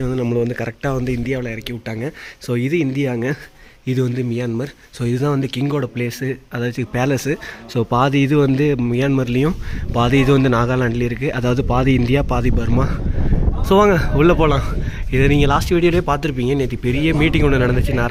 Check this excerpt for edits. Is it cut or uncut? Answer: uncut